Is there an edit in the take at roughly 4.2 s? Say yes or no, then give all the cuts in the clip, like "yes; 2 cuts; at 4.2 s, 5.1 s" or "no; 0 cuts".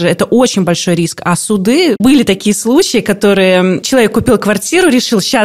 no; 1 cut; at 2.0 s